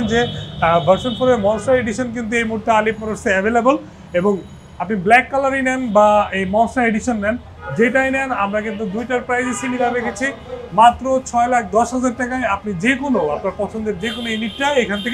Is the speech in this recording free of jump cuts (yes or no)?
yes